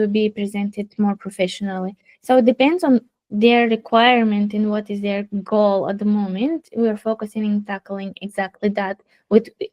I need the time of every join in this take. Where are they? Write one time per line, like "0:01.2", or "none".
none